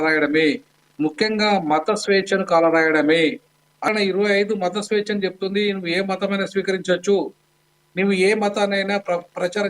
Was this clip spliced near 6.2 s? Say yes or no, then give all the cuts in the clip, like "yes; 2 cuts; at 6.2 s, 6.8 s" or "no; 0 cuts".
no; 1 cut; at 3.9 s